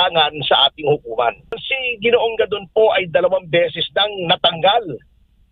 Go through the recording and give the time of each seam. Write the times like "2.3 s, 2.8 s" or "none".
1.6 s